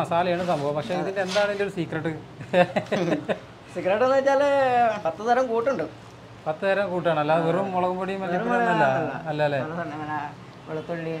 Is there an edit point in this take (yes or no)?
no